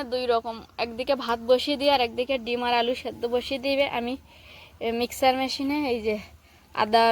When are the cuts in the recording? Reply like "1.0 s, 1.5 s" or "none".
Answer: none